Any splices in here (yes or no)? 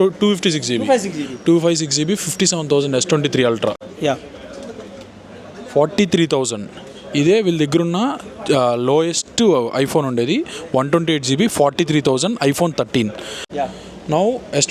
yes